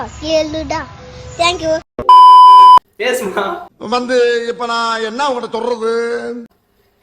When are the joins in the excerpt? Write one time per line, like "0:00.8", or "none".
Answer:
0:02.8